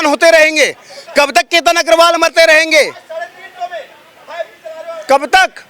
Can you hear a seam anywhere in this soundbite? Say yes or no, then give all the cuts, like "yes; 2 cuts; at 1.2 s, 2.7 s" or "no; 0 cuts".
no; 0 cuts